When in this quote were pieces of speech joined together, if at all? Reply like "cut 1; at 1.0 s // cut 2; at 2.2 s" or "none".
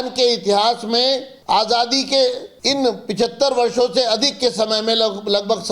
cut 1; at 1.3 s // cut 2; at 2.5 s